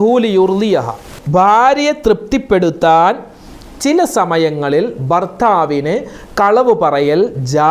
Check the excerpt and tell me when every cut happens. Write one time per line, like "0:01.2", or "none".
0:01.1